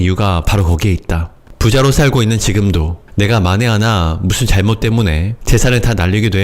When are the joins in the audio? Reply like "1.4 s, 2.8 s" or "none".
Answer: 1.5 s, 3.0 s